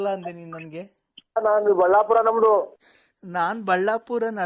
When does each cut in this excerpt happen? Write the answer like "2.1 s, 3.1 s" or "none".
1.6 s